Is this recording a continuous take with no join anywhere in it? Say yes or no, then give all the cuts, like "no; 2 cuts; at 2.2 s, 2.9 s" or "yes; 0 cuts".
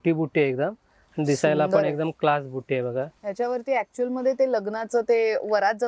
no; 1 cut; at 3.2 s